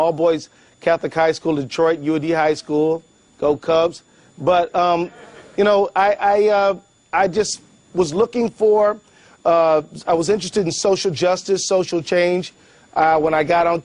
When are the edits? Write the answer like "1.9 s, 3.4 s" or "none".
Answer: 2.4 s